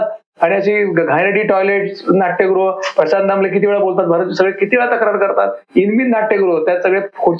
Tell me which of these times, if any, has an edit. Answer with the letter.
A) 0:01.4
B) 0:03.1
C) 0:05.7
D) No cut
D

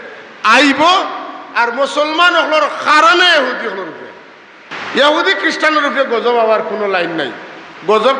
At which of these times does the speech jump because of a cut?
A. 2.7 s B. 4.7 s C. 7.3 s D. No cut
B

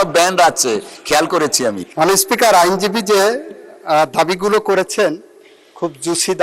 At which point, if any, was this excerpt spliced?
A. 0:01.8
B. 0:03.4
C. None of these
A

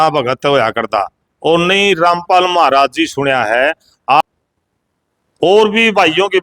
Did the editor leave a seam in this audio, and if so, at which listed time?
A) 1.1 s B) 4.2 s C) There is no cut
B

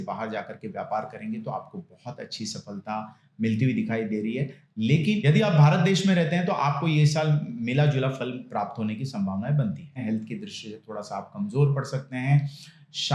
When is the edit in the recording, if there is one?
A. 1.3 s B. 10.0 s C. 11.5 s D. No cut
B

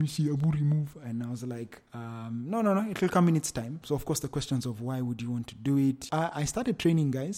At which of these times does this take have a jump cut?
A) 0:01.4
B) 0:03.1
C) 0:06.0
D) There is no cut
C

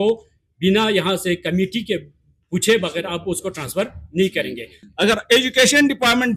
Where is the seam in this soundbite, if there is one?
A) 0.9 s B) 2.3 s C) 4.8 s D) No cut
C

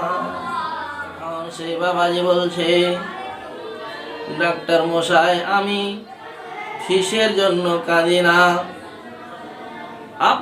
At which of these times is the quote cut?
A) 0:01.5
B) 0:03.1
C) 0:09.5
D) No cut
A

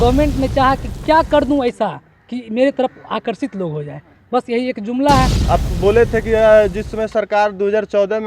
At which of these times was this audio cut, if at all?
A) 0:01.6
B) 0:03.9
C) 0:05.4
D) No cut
C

